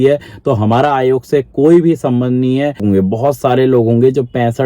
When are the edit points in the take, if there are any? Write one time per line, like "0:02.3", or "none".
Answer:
0:02.8